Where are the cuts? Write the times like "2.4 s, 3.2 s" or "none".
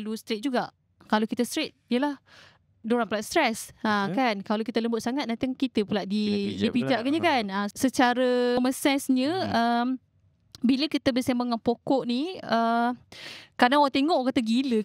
7.7 s, 8.6 s